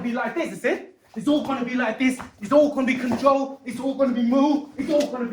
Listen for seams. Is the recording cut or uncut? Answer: uncut